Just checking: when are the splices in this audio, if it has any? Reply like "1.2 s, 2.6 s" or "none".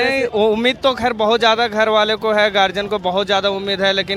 none